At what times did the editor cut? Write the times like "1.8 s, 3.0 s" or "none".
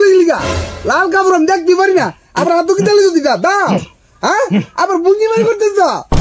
none